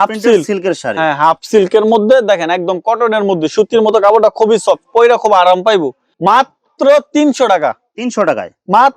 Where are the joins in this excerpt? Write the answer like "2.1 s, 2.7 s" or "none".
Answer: none